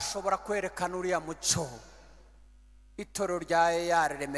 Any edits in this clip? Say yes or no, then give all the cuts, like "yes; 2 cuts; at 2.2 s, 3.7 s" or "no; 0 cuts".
no; 0 cuts